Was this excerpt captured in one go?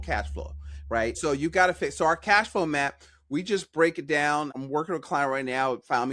no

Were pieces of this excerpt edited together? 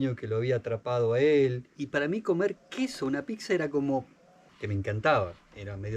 yes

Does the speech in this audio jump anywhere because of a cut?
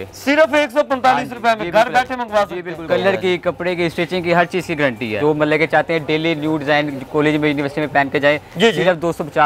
yes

